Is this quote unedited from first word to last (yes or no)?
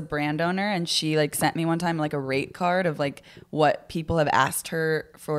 yes